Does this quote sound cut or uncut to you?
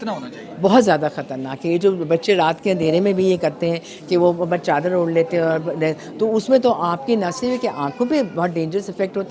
uncut